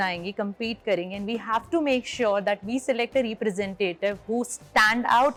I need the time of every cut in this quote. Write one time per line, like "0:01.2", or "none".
none